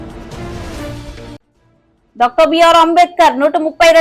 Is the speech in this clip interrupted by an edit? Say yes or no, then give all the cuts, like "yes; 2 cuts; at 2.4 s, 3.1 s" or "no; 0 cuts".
yes; 1 cut; at 1.3 s